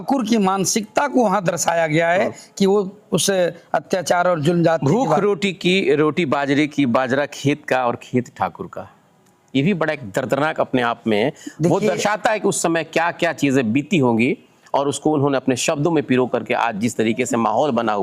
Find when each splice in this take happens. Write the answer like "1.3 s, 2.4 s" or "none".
none